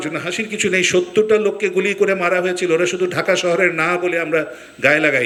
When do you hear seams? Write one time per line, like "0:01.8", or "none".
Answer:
none